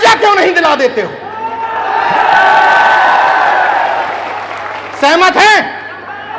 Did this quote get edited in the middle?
no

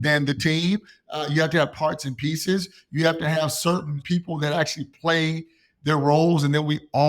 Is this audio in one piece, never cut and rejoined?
no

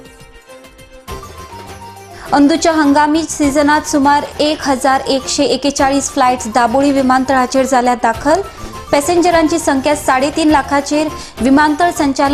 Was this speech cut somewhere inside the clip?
yes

